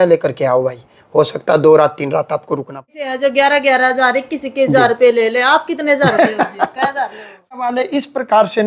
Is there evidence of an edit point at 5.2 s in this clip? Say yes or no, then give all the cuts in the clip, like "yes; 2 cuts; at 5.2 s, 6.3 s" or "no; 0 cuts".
no; 2 cuts; at 2.9 s, 7.5 s